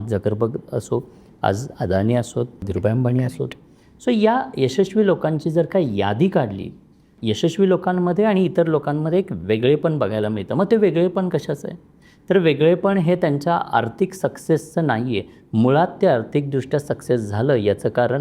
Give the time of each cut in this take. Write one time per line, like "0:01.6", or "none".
0:02.7
0:07.1